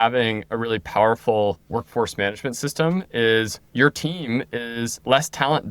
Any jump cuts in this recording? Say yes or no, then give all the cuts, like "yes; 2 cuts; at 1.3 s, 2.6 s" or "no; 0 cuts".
yes; 1 cut; at 3.6 s